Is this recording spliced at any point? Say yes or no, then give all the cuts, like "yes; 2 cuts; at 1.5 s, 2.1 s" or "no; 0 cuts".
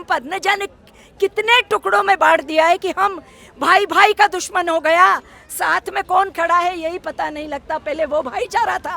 no; 0 cuts